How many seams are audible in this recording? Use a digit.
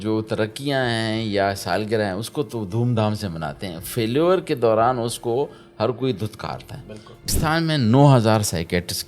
1